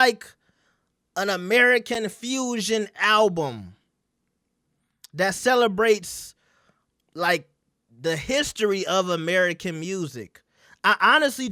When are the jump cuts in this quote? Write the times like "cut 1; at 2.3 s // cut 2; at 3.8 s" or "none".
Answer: none